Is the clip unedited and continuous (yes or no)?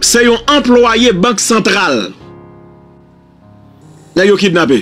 yes